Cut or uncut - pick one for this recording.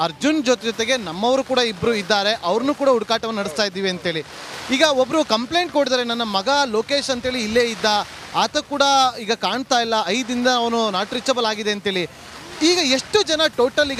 uncut